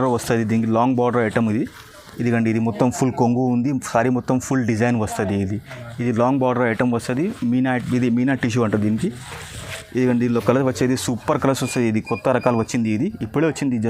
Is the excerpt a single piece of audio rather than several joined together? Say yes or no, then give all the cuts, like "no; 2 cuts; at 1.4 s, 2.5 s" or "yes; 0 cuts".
yes; 0 cuts